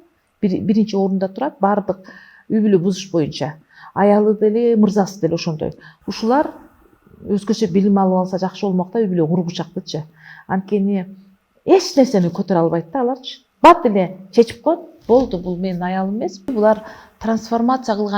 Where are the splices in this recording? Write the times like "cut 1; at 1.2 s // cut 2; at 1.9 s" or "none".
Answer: cut 1; at 16.5 s